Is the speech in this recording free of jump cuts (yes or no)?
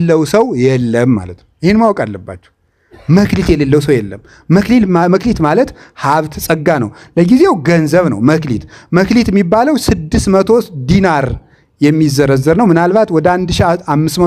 yes